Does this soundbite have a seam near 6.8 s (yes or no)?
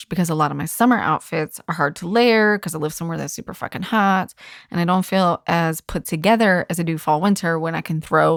no